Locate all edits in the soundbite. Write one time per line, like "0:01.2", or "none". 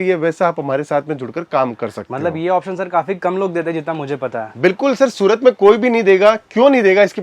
none

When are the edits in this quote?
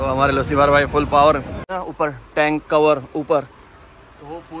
0:01.6

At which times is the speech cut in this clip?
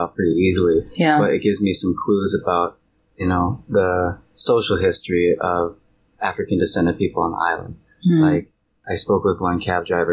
0:08.8

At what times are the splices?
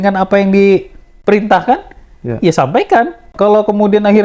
0:03.3

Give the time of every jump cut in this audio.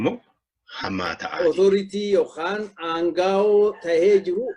0:01.2

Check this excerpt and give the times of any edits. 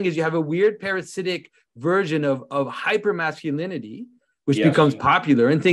none

